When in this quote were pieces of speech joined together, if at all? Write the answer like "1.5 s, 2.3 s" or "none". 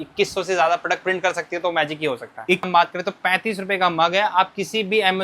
2.7 s